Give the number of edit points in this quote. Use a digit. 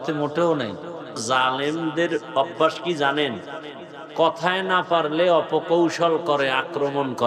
1